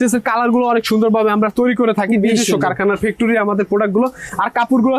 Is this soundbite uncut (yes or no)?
yes